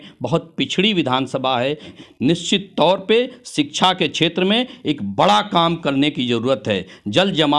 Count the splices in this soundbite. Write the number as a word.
one